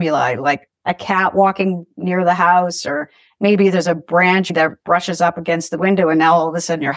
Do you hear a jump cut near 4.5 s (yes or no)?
yes